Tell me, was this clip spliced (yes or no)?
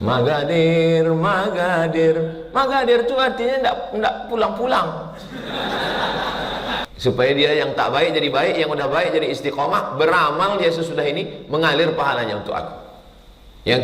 yes